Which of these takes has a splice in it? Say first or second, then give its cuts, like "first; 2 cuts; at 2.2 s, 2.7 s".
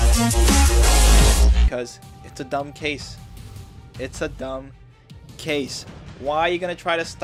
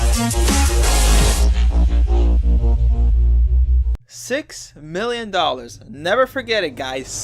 second; 1 cut; at 1.7 s